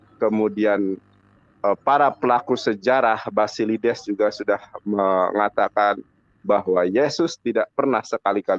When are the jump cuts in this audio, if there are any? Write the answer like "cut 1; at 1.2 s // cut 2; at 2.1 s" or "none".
none